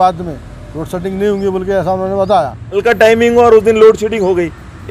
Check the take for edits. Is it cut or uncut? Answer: cut